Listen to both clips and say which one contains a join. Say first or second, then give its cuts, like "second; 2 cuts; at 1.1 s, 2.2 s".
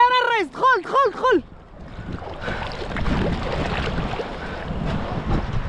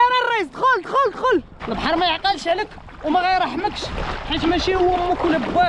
second; 1 cut; at 1.6 s